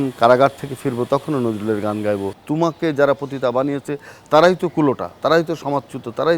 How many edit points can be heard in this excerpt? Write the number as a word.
one